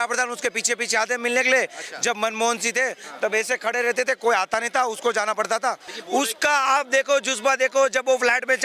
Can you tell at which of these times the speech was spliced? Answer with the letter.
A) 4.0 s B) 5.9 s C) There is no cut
B